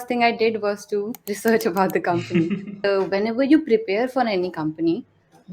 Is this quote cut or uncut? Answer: cut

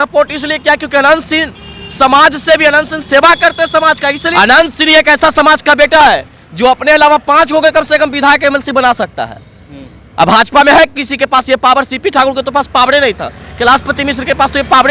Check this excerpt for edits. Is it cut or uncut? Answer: cut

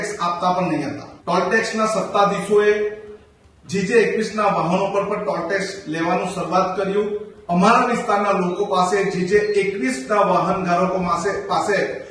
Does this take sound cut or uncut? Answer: cut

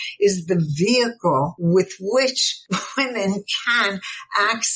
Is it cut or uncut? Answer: cut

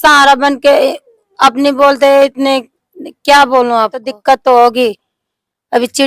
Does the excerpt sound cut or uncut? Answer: cut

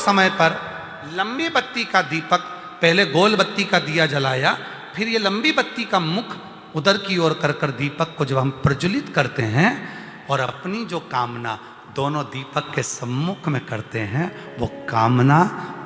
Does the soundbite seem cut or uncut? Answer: uncut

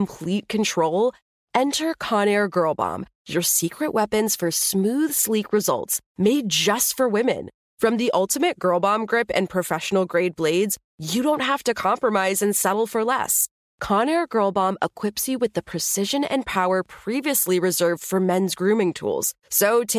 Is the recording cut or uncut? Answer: uncut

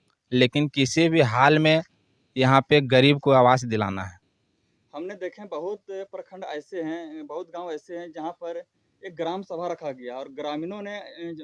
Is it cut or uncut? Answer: uncut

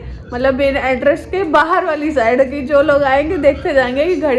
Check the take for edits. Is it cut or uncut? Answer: uncut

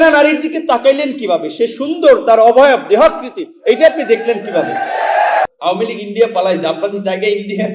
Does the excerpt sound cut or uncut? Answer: cut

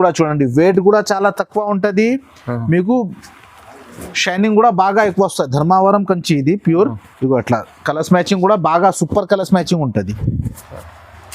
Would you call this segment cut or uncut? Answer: cut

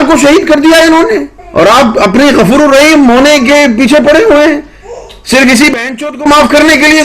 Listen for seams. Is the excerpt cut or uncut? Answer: cut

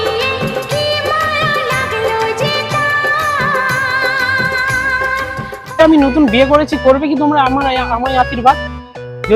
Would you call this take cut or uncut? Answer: cut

